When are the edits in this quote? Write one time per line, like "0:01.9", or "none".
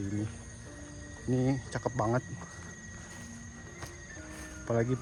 none

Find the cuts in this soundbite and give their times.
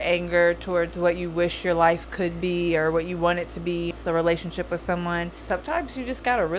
0:03.9
0:05.4

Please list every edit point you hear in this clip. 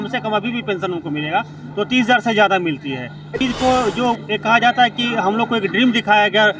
0:03.3

